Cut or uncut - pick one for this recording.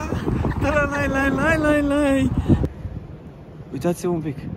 cut